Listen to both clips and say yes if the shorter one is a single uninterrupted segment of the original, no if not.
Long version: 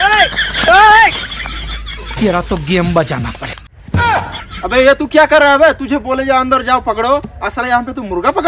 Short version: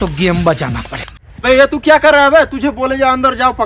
no